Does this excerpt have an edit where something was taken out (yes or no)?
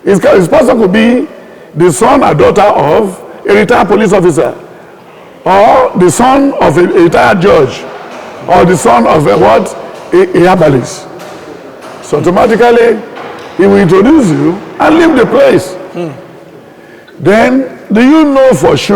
no